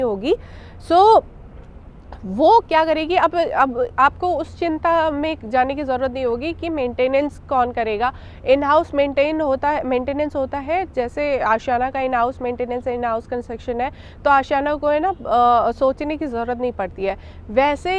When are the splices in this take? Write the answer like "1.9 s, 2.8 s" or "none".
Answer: none